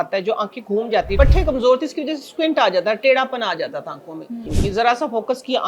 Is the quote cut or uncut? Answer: cut